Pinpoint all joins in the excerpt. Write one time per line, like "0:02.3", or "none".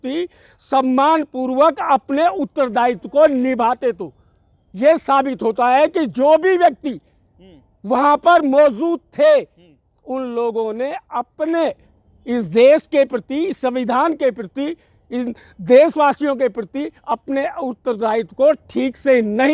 none